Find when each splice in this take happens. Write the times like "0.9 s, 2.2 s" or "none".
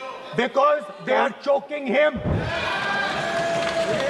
2.3 s